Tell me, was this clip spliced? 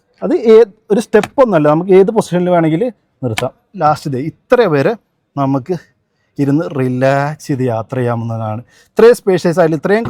no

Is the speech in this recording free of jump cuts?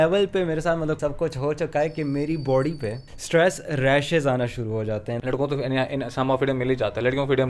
no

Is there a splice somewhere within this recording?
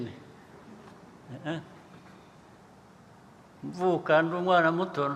no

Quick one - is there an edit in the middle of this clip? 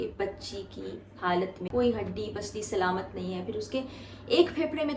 yes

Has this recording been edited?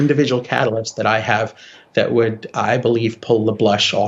no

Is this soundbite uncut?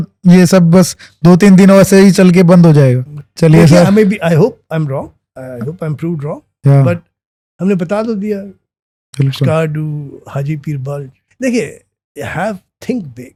yes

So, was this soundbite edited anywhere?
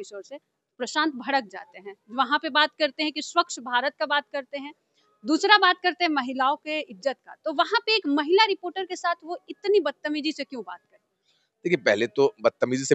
no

